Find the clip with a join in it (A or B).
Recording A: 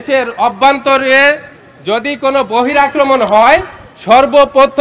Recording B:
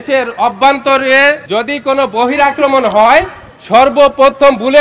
B